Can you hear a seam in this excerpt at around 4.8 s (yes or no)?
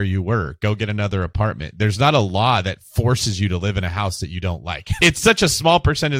yes